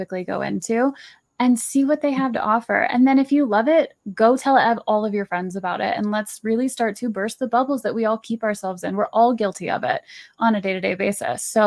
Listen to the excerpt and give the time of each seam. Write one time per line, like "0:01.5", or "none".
none